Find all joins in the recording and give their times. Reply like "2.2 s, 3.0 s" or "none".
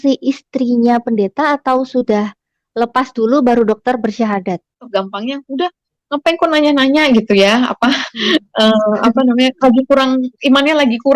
4.9 s

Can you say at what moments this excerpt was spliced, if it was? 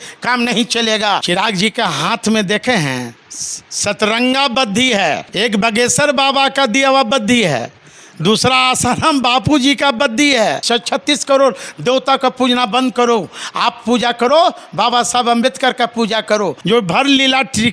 1.2 s, 5.3 s, 10.6 s, 16.6 s

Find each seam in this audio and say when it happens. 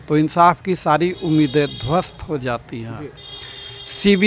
none

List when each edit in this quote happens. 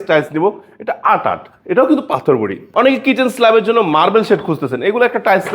2.6 s

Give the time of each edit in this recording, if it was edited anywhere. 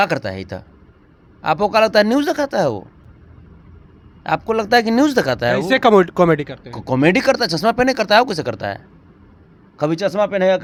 none

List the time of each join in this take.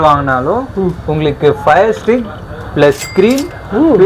none

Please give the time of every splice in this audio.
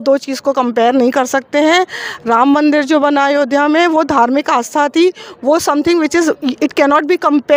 none

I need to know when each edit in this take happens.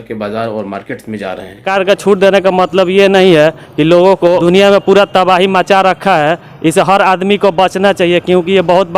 1.6 s, 4.4 s

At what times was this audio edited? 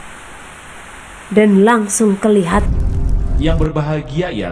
2.6 s

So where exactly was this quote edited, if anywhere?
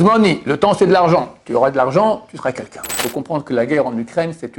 3.0 s

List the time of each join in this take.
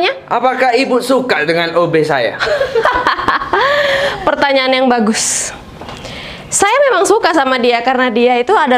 none

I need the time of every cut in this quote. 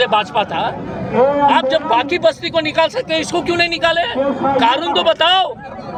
none

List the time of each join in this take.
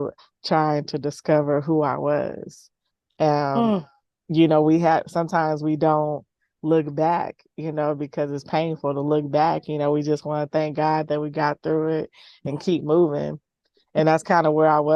none

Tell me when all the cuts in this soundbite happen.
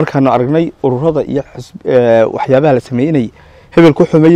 none

